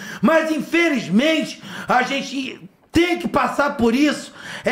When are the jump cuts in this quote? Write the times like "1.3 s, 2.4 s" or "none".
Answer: none